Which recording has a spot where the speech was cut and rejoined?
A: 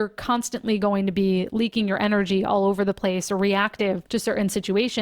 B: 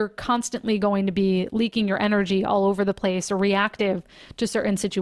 A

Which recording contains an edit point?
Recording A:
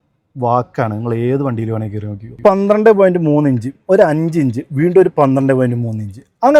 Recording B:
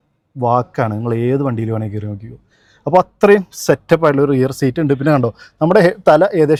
A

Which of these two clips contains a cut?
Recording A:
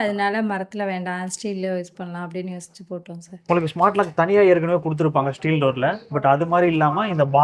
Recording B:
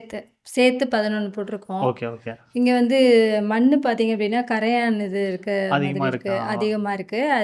A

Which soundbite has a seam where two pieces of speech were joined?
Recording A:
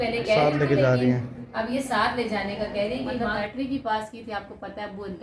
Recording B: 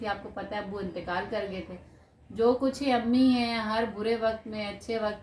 A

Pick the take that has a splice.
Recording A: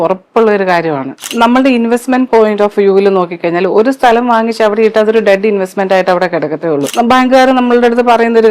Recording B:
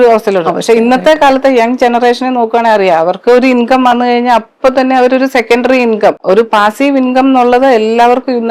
A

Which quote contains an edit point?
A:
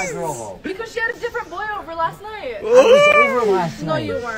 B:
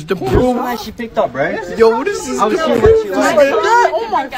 A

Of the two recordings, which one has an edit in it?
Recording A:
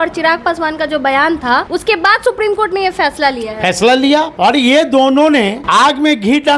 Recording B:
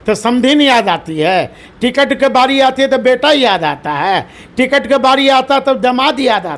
A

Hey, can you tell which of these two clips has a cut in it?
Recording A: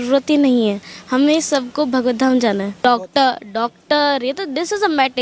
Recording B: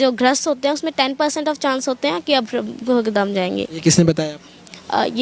A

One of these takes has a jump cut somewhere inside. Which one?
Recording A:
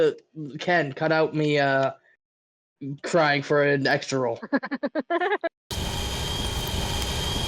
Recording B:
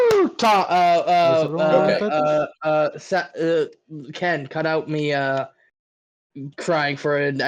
A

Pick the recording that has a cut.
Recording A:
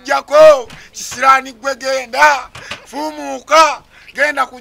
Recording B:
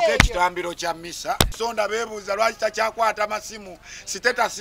B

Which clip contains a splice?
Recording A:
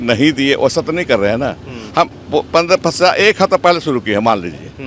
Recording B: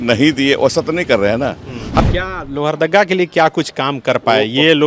B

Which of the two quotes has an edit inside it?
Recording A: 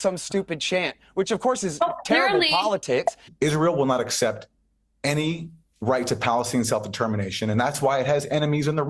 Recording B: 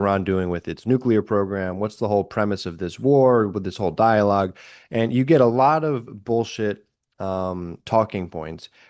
A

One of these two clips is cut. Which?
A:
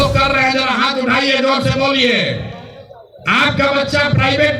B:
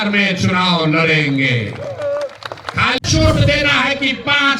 B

